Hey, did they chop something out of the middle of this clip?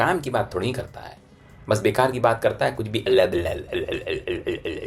no; 0 cuts

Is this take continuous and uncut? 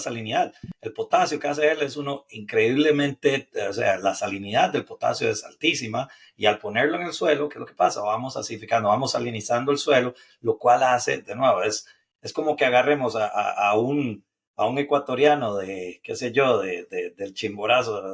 yes; 0 cuts

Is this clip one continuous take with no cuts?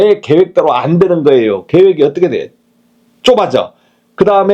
yes; 0 cuts

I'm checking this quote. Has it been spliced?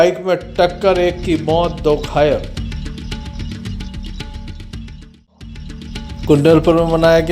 yes; 2 cuts; at 2.5 s, 5.9 s

